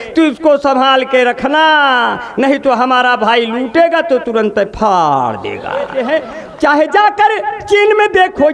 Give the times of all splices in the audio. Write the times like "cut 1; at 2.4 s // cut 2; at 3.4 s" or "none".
cut 1; at 6.0 s